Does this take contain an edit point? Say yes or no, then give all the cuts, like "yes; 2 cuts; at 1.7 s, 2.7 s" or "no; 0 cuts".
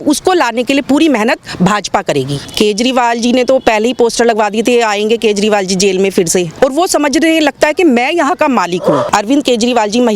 yes; 3 cuts; at 2.4 s, 6.5 s, 9.0 s